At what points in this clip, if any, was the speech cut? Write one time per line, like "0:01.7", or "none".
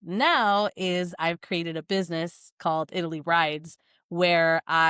none